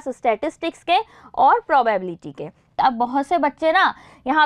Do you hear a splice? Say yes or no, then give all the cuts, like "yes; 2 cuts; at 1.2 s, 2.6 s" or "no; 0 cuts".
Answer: yes; 1 cut; at 2.8 s